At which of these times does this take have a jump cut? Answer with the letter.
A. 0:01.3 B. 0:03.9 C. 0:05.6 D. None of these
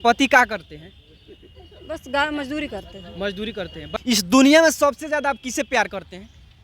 B